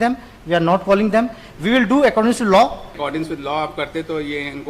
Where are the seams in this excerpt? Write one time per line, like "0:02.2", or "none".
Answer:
0:03.0